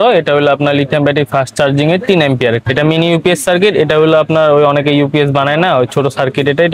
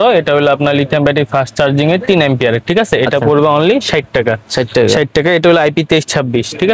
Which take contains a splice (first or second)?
first